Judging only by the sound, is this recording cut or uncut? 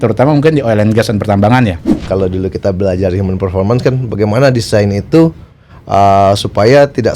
cut